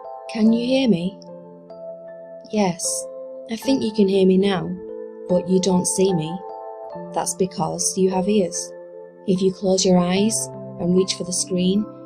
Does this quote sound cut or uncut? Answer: uncut